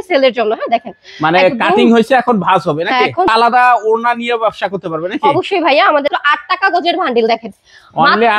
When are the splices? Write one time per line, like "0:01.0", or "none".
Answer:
0:03.3
0:06.1